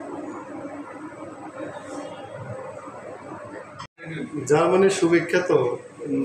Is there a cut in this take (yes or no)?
yes